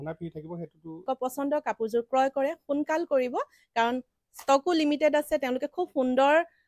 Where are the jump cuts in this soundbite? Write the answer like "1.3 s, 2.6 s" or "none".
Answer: 1.0 s